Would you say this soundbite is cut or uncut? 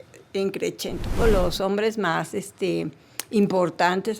cut